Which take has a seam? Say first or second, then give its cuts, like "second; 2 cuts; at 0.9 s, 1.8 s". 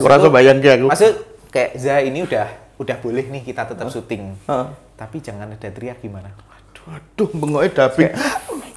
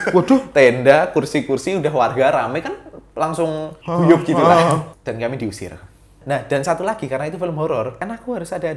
second; 4 cuts; at 3.7 s, 4.9 s, 6.2 s, 8.0 s